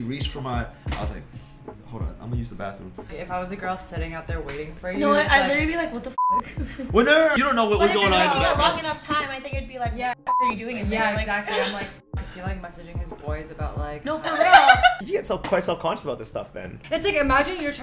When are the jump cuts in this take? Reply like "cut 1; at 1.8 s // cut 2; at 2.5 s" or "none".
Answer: cut 1; at 3.1 s // cut 2; at 7.3 s // cut 3; at 15.0 s // cut 4; at 16.8 s